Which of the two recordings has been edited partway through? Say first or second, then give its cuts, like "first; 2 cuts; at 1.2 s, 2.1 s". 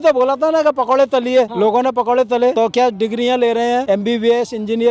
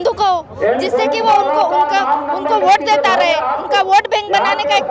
first; 3 cuts; at 1.5 s, 2.5 s, 3.8 s